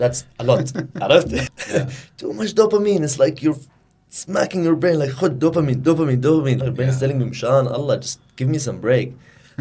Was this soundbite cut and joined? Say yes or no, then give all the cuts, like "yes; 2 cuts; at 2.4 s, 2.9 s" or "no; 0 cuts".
yes; 2 cuts; at 1.4 s, 6.6 s